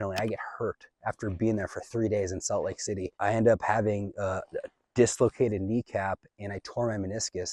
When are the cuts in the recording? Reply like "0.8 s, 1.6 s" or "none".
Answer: none